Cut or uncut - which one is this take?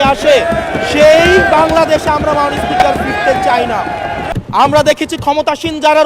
cut